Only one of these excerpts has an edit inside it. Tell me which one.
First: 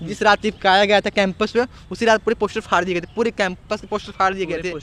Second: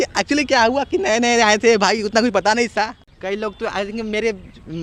second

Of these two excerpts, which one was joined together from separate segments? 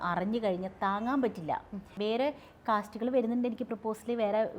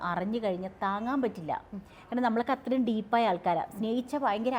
first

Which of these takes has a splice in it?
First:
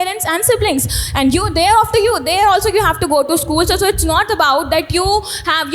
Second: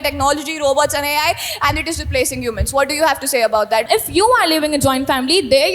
second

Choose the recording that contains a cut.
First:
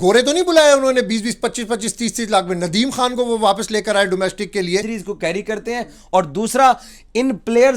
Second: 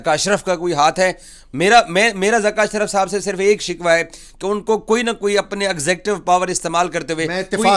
first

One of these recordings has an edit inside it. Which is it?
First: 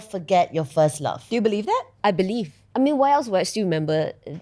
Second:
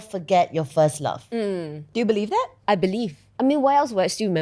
first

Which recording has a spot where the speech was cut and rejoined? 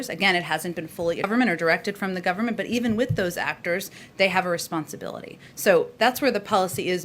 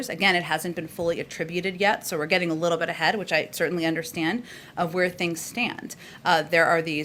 first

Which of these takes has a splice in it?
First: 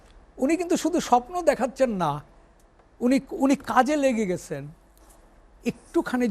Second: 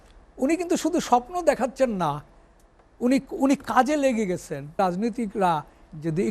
second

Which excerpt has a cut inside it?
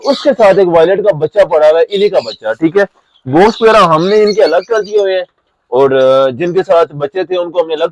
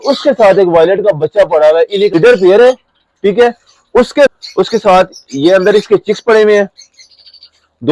second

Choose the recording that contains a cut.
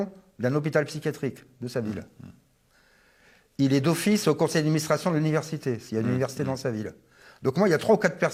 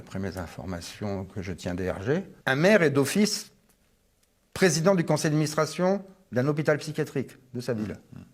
second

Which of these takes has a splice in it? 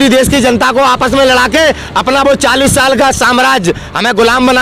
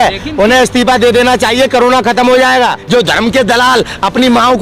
second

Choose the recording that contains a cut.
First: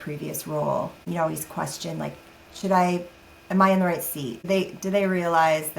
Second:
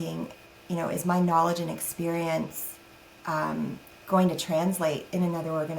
first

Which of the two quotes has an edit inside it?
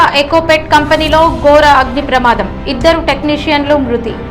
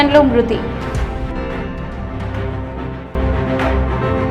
second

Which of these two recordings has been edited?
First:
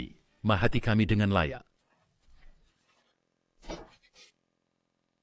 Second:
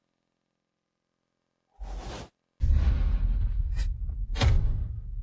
second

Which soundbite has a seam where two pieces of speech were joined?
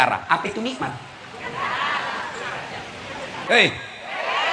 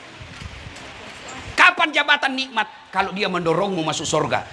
first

